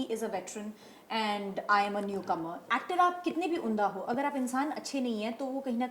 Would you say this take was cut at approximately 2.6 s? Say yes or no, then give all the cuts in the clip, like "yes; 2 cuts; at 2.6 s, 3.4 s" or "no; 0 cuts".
yes; 1 cut; at 2.6 s